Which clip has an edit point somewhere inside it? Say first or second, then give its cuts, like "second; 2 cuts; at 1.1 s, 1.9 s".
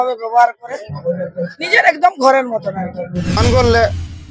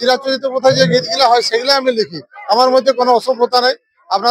first; 1 cut; at 3.4 s